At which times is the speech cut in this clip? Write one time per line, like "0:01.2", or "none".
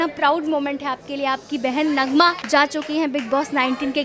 0:02.4